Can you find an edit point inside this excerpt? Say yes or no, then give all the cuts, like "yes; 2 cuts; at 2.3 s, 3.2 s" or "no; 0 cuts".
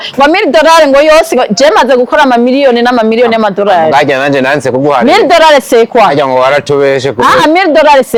no; 0 cuts